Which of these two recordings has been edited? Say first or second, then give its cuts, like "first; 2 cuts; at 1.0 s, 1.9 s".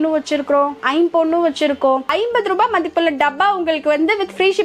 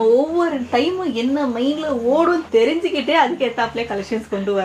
first; 1 cut; at 2.1 s